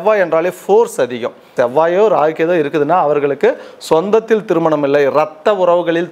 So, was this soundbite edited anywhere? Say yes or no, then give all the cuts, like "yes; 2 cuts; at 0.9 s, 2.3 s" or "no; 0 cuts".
yes; 1 cut; at 1.5 s